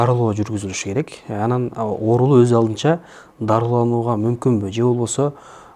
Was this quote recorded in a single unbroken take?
yes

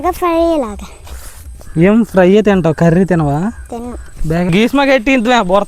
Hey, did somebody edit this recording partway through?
yes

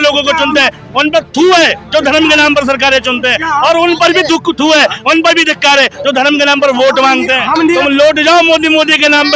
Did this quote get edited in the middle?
yes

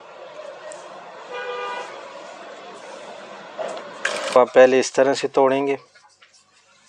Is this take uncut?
no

